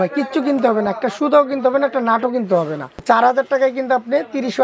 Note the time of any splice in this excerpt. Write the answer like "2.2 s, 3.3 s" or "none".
2.9 s